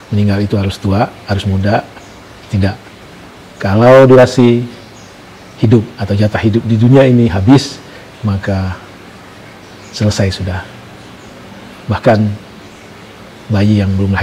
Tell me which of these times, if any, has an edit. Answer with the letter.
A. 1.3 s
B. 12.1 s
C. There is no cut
C